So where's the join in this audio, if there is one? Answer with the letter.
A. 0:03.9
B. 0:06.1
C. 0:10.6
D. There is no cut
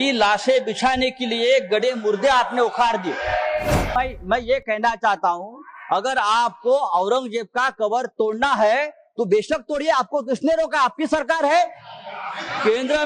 A